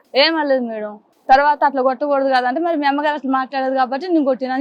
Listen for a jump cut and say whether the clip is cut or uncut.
uncut